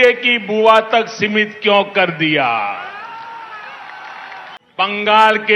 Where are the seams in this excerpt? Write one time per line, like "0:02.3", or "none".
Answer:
0:04.6

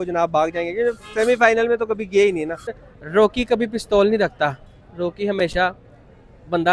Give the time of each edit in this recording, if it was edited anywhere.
0:02.8

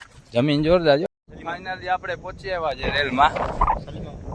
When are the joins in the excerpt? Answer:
0:01.1

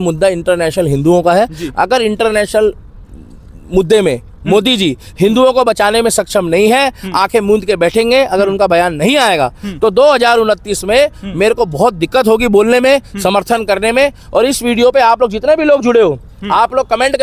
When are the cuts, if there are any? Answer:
none

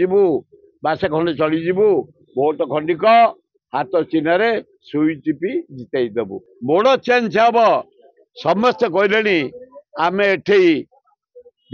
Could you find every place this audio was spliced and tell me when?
0:06.4

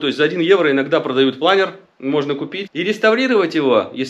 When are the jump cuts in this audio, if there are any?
0:02.6

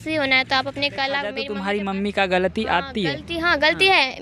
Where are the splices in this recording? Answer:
0:01.4

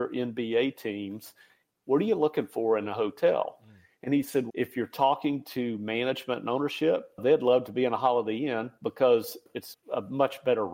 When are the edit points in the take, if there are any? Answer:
0:04.5
0:07.2
0:09.6

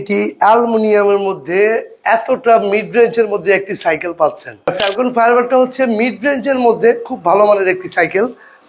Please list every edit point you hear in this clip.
0:04.7

